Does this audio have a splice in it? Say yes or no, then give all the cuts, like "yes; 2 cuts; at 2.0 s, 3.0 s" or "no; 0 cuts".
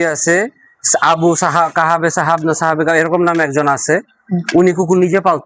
no; 0 cuts